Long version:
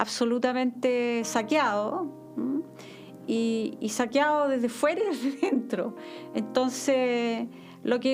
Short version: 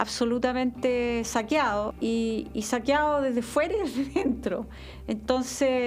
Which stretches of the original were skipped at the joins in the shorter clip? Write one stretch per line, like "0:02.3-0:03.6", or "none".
0:01.9-0:03.2